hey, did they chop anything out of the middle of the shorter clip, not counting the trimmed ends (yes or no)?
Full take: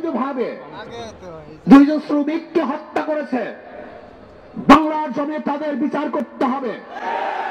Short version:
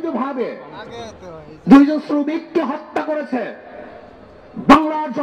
no